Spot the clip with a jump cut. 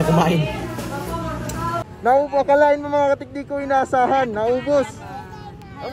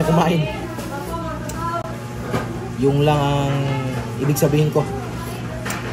first; 1 cut; at 1.8 s

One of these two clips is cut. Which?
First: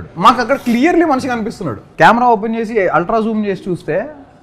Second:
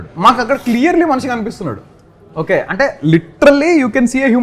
first; 1 cut; at 1.8 s

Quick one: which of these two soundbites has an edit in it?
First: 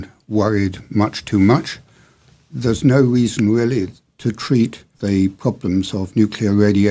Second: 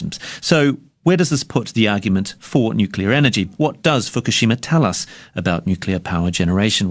first; 1 cut; at 3.3 s

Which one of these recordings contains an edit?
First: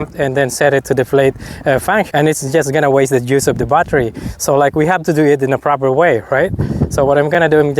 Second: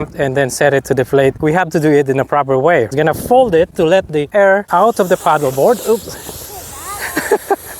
second; 4 cuts; at 1.4 s, 2.9 s, 4.3 s, 5.8 s

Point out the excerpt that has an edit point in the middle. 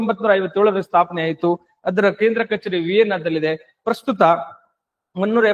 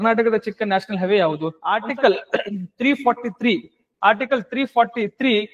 second; 1 cut; at 1.5 s

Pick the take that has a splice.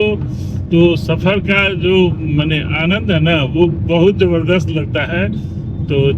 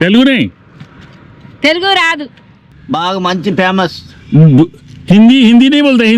second; 1 cut; at 2.7 s

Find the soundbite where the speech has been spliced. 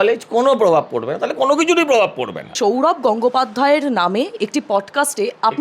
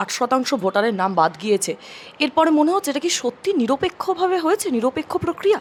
first; 1 cut; at 2.5 s

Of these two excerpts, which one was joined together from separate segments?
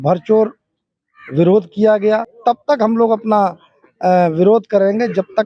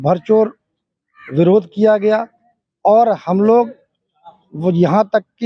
first; 1 cut; at 2.3 s

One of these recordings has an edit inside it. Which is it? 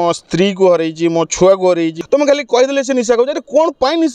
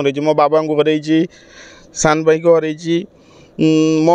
first; 1 cut; at 2.0 s

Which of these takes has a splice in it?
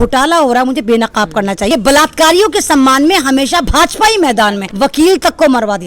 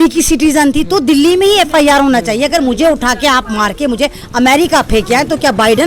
first; 2 cuts; at 1.7 s, 4.7 s

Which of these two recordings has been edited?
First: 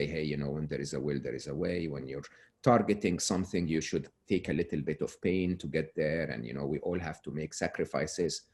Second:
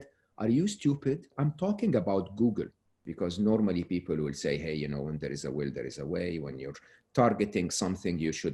second; 2 cuts; at 1.4 s, 3.0 s

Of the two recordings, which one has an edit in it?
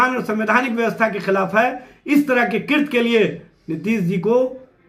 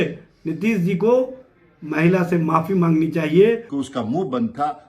second; 1 cut; at 3.8 s

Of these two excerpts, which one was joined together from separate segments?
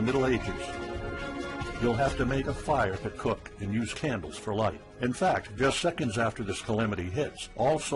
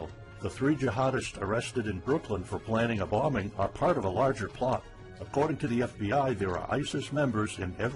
first; 1 cut; at 4.2 s

